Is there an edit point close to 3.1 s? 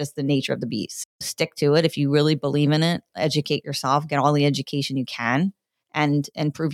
no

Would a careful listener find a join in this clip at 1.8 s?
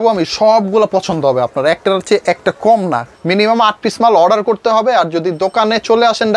no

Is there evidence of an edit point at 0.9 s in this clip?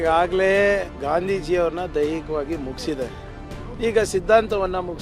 yes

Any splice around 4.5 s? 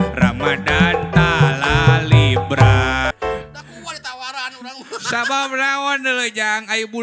no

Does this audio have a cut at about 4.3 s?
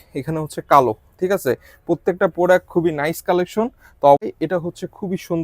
yes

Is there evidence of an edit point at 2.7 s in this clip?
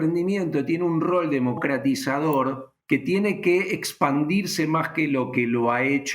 yes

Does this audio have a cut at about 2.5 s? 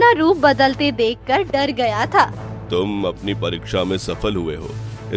yes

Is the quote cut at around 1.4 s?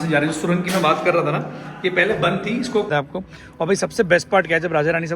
no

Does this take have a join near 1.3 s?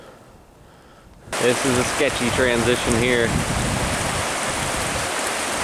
yes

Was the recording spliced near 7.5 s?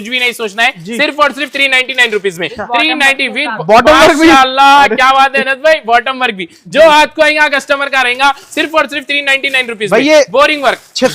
no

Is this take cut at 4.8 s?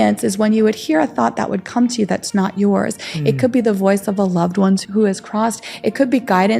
yes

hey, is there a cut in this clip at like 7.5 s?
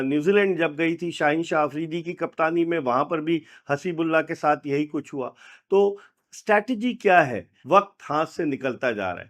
yes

